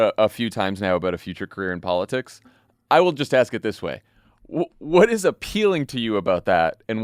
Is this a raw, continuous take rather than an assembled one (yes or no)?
yes